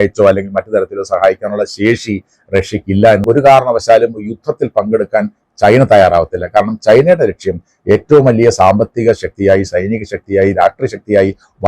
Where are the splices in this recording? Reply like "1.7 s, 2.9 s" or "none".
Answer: 3.2 s